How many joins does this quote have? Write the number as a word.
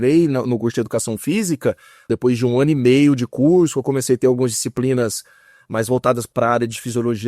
two